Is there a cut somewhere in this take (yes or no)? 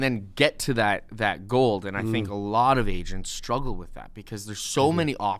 no